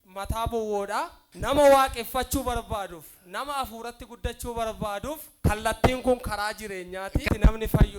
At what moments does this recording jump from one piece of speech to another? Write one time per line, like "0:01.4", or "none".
0:01.2
0:05.3
0:07.2